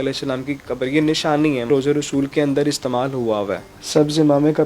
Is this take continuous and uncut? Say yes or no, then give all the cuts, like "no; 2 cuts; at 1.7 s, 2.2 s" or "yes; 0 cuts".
no; 2 cuts; at 1.7 s, 3.6 s